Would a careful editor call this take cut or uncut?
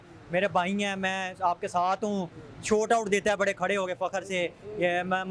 uncut